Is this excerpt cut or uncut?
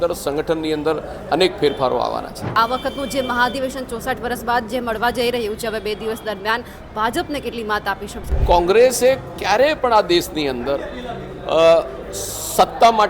cut